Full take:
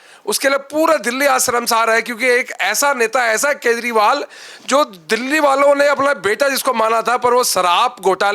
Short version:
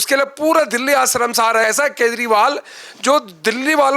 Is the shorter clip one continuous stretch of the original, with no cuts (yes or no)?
no